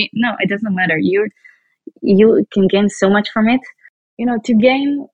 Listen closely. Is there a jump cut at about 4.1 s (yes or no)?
yes